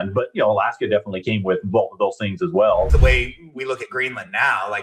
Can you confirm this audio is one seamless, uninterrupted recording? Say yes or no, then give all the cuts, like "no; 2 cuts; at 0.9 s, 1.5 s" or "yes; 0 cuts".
no; 1 cut; at 2.9 s